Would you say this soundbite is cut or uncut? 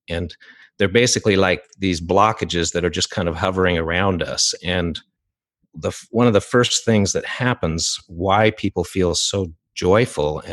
uncut